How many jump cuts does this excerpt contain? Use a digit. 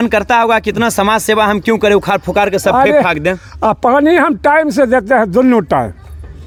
0